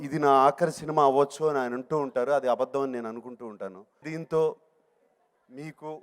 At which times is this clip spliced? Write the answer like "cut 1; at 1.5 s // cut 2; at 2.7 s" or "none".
cut 1; at 4.1 s